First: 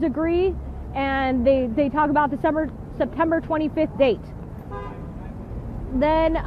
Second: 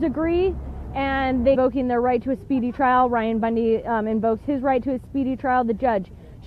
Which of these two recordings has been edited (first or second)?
first